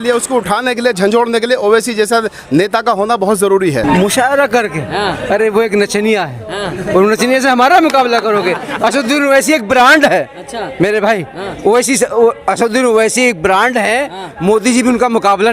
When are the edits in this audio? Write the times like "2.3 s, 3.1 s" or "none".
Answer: 3.8 s